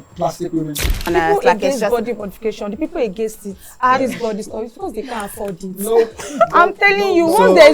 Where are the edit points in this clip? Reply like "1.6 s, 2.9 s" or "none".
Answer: 1.1 s